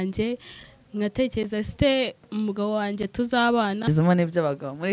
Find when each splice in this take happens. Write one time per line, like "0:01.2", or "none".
0:03.8